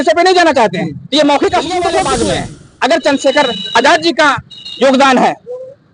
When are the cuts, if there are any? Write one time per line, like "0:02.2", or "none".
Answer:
0:02.1